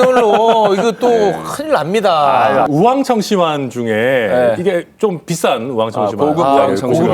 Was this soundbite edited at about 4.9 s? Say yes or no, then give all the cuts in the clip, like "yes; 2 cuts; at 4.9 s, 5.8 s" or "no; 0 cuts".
no; 1 cut; at 2.7 s